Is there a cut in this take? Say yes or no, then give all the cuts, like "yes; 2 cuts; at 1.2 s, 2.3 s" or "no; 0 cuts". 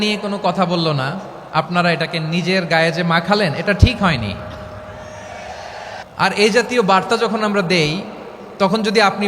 yes; 1 cut; at 6.0 s